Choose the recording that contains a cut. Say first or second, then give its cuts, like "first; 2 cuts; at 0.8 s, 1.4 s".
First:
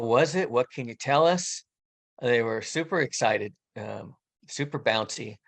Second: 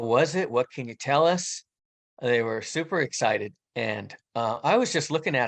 second; 1 cut; at 3.6 s